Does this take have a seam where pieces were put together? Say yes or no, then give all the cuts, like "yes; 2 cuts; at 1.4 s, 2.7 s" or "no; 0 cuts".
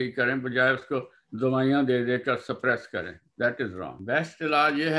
yes; 1 cut; at 4.0 s